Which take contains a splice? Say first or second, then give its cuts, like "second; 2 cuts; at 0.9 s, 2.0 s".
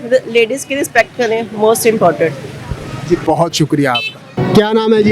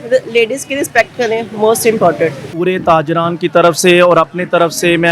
second; 1 cut; at 2.5 s